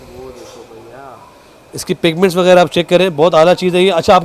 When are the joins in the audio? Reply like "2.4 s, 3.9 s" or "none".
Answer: none